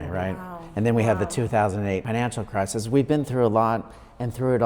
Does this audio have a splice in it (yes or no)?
yes